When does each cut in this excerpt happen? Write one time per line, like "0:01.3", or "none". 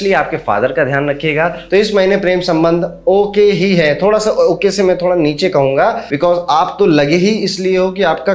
0:01.6
0:06.1